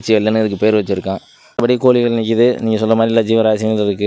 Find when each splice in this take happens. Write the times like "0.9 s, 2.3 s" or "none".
1.6 s